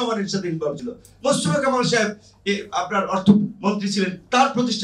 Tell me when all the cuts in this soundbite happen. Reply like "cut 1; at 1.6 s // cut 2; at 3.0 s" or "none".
none